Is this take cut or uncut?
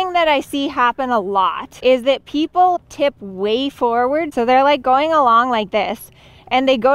cut